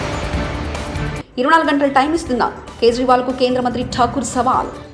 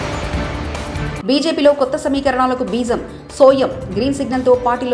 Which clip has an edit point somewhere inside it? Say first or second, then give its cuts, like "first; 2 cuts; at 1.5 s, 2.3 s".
first; 1 cut; at 1.1 s